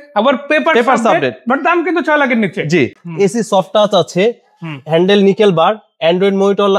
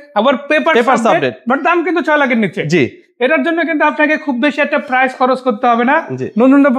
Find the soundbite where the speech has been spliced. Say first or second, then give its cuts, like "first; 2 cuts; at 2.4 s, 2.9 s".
first; 1 cut; at 3.0 s